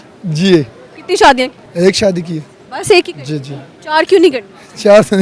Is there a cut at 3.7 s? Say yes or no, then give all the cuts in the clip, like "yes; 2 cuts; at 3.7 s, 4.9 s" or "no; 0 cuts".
no; 1 cut; at 1.6 s